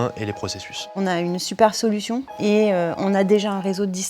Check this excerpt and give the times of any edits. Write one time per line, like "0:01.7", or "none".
0:00.9
0:02.3